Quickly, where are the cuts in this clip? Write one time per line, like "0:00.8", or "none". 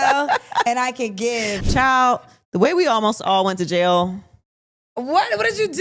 0:01.5